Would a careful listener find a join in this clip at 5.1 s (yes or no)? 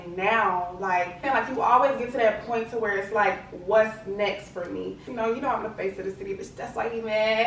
yes